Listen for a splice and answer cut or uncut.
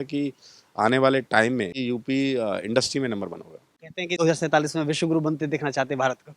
cut